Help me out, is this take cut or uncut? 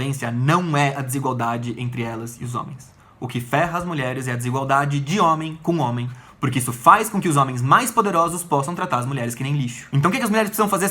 cut